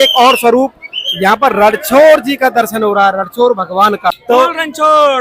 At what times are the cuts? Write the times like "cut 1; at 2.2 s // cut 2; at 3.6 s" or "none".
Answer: cut 1; at 4.1 s